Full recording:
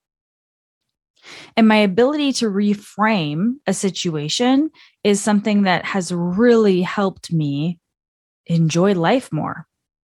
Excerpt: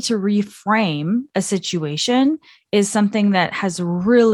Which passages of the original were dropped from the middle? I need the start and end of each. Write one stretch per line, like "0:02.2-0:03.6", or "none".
none